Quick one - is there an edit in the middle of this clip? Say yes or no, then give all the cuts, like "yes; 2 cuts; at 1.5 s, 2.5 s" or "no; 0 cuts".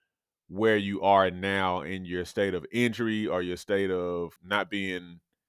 yes; 1 cut; at 4.4 s